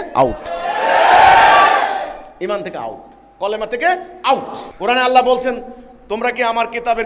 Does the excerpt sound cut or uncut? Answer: cut